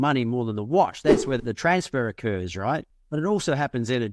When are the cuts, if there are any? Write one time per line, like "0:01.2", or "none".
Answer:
0:01.4
0:02.9